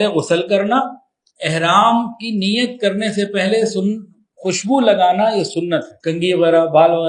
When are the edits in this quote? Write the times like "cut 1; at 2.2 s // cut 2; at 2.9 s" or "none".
cut 1; at 6.0 s